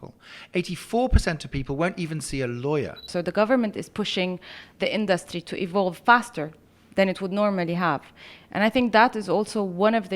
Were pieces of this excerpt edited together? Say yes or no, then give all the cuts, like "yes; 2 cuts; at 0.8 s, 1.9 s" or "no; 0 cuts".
yes; 1 cut; at 3.1 s